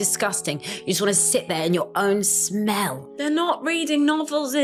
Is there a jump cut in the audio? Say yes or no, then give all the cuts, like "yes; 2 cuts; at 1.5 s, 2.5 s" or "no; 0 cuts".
no; 0 cuts